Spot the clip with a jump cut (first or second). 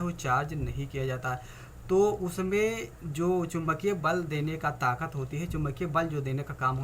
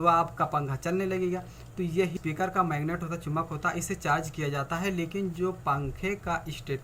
second